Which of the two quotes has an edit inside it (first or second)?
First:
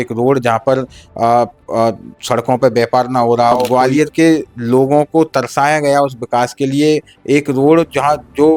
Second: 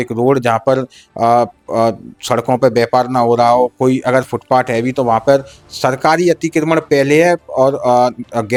first